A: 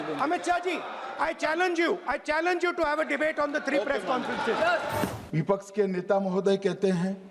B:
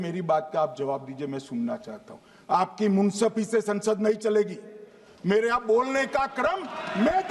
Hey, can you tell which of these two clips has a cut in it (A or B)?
A